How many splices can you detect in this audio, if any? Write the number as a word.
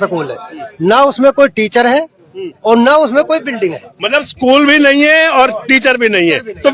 one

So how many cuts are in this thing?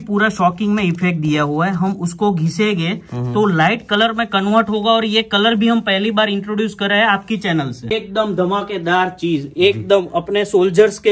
one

